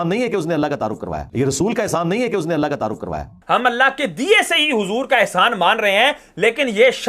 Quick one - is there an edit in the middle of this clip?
yes; 1 cut; at 3.4 s

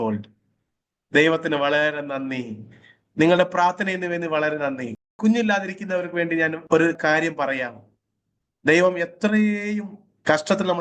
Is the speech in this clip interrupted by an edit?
yes; 2 cuts; at 5.1 s, 6.9 s

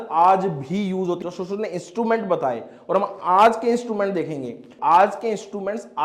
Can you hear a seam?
yes; 2 cuts; at 1.2 s, 4.7 s

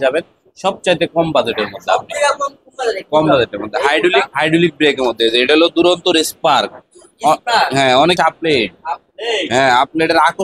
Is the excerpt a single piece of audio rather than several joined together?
no; 1 cut; at 8.2 s

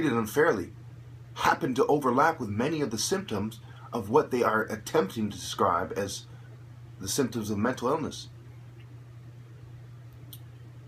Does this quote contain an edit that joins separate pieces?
no; 0 cuts

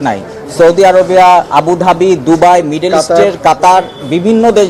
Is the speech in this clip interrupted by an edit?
no; 0 cuts

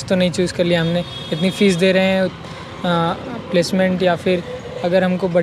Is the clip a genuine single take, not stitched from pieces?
yes; 0 cuts

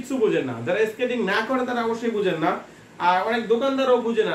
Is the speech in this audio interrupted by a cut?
no; 0 cuts

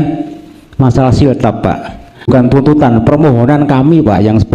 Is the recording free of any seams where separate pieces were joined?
no; 1 cut; at 2.3 s

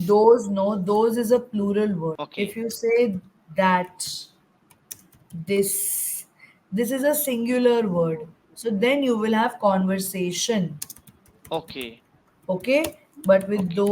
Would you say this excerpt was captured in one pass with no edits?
no; 1 cut; at 2.2 s

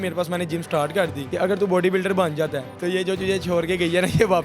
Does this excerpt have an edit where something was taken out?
yes; 2 cuts; at 1.2 s, 2.7 s

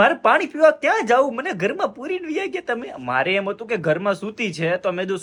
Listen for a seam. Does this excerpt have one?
no; 0 cuts

